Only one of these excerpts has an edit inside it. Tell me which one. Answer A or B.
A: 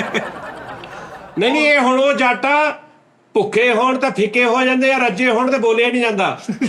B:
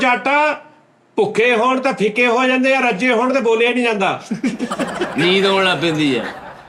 A